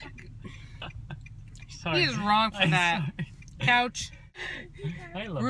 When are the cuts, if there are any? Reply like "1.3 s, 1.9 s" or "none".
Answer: 4.3 s